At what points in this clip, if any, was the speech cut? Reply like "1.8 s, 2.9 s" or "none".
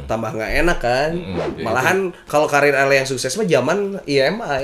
1.5 s